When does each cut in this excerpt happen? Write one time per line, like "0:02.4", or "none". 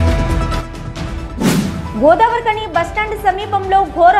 none